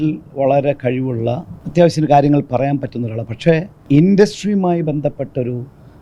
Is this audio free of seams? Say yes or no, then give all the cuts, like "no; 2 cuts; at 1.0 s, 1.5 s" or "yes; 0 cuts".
no; 2 cuts; at 1.5 s, 3.9 s